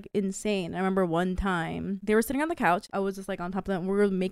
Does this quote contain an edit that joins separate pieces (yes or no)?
yes